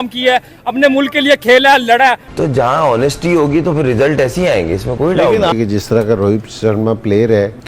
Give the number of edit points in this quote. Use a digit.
2